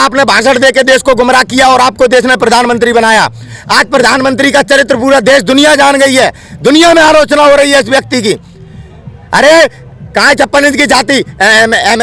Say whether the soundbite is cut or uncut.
uncut